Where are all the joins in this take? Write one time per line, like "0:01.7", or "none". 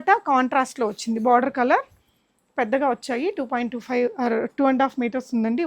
none